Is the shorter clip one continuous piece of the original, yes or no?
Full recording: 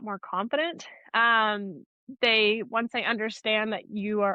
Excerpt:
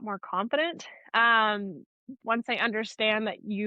no